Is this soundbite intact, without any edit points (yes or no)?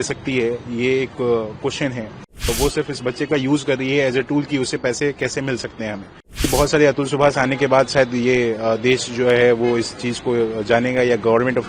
no